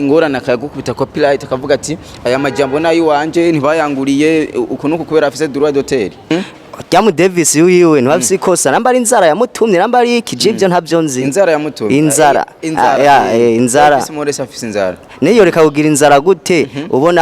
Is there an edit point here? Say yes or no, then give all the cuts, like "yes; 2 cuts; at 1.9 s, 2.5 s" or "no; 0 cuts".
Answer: yes; 1 cut; at 6.2 s